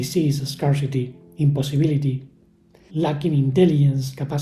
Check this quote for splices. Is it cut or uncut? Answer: uncut